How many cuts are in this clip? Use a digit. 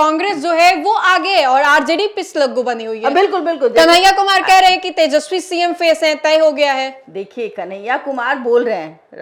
0